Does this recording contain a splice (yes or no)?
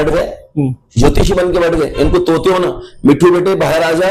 no